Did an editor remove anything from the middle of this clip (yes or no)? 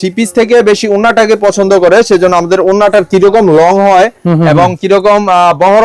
no